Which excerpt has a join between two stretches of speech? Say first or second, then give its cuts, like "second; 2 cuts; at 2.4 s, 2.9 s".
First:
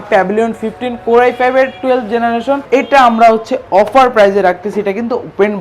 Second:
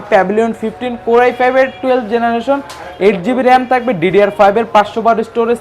first; 1 cut; at 2.6 s